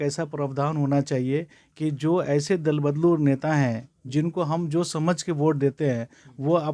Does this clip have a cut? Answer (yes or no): no